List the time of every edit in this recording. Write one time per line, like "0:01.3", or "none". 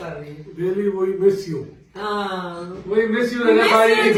none